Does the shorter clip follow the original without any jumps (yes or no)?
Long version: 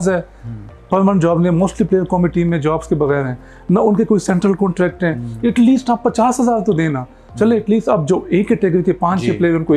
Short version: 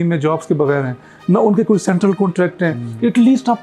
yes